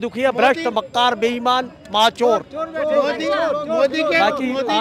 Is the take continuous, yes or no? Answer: yes